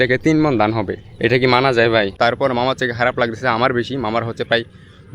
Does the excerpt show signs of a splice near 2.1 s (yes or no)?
yes